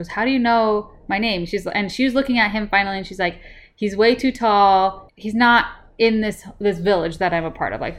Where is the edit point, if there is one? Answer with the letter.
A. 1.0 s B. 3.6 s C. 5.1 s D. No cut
C